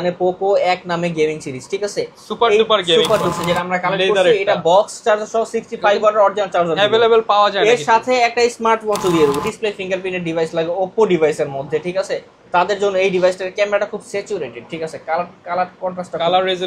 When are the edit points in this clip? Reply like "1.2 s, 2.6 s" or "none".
3.4 s, 9.4 s